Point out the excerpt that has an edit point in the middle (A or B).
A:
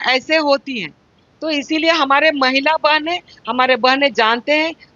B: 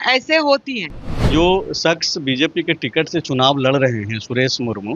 B